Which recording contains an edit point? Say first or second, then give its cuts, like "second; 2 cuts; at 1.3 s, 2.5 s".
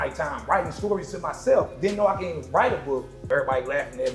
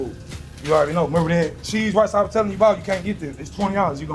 first; 1 cut; at 3.3 s